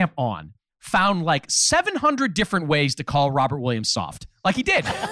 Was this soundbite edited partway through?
no; 0 cuts

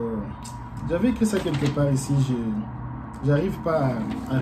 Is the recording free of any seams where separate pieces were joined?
yes; 0 cuts

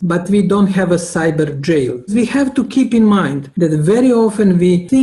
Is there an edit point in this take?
yes; 1 cut; at 2.1 s

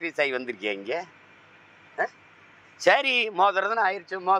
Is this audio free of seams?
yes; 0 cuts

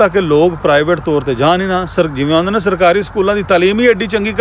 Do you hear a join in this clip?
no; 0 cuts

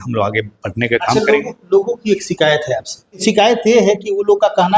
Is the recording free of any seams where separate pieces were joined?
no; 1 cut; at 3.2 s

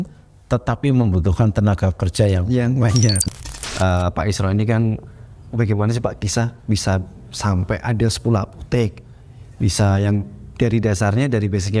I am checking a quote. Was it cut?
yes; 1 cut; at 3.2 s

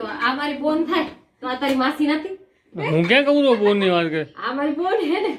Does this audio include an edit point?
no; 0 cuts

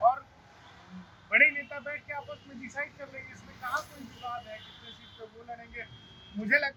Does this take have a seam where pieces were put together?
no; 0 cuts

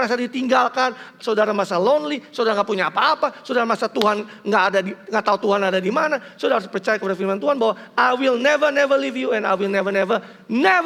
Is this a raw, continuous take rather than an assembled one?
yes; 0 cuts

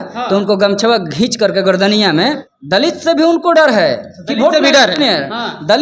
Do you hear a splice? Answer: yes; 1 cut; at 2.5 s

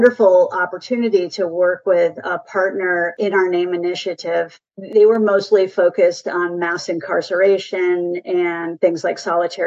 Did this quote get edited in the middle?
no; 0 cuts

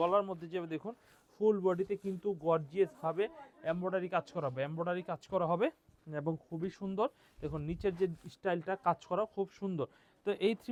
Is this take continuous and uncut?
yes; 0 cuts

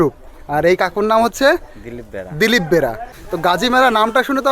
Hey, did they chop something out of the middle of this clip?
yes; 1 cut; at 3.2 s

